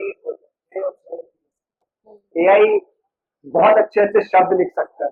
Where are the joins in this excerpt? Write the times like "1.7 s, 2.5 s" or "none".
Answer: none

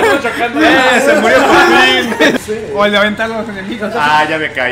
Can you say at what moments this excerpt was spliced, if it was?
2.4 s

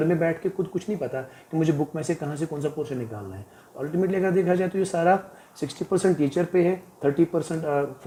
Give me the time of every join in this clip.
none

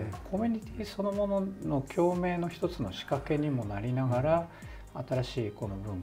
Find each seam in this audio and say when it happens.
none

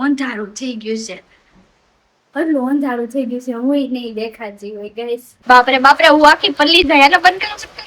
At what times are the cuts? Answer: 5.3 s

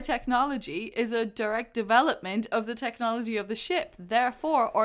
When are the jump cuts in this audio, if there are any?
none

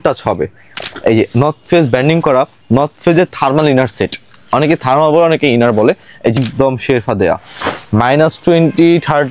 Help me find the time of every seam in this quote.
0.9 s, 6.4 s

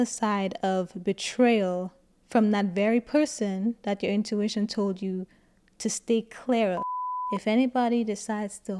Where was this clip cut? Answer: 7.0 s

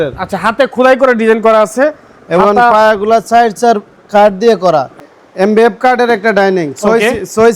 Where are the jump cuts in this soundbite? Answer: 5.1 s

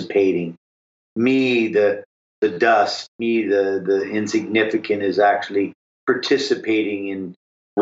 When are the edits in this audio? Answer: none

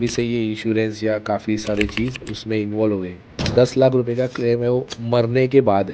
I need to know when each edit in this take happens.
3.3 s

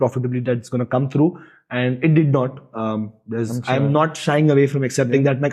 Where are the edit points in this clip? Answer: none

